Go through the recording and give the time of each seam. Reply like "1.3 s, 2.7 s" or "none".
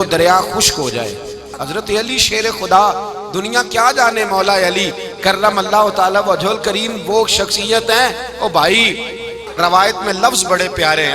1.5 s, 9.4 s